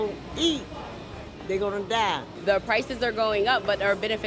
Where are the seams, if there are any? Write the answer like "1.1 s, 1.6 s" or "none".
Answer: 2.3 s

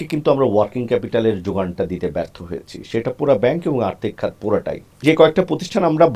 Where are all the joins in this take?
5.0 s

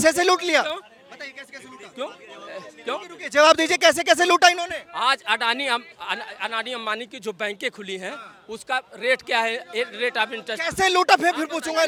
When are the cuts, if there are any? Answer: none

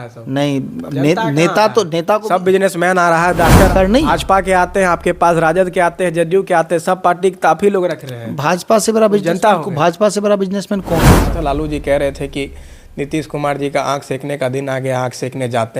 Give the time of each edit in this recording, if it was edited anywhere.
3.7 s, 11.2 s

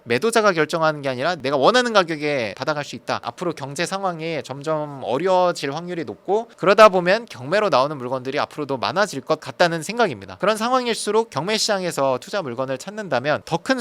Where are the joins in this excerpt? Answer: 1.4 s, 3.2 s, 11.3 s

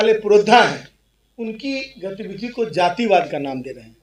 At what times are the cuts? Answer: none

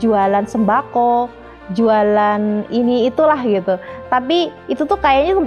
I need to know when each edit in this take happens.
none

